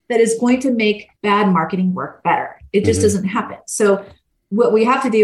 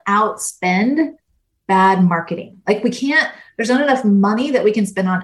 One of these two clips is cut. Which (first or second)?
first